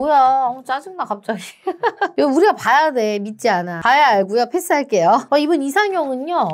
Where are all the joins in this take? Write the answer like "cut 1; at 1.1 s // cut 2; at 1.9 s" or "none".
none